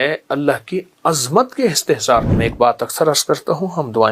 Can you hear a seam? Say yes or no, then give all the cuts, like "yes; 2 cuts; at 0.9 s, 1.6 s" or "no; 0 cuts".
yes; 1 cut; at 2.4 s